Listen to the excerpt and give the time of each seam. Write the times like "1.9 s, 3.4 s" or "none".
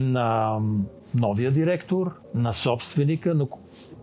1.0 s, 2.2 s